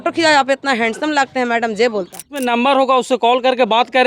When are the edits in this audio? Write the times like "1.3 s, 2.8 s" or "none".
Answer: 2.4 s